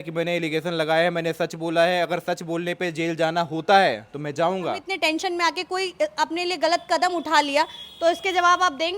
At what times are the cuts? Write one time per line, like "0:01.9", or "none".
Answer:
0:04.9